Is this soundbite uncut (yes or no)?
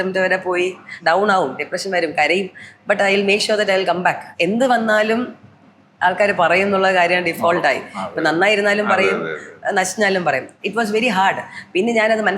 no